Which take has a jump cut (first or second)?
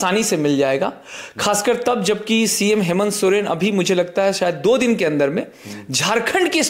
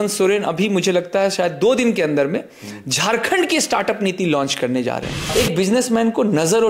second